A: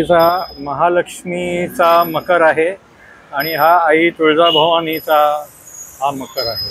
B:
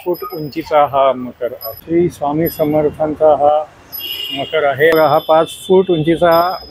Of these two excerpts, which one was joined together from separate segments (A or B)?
B